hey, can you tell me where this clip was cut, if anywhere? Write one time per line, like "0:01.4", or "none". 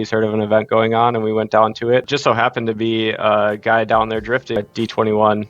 0:02.1
0:04.6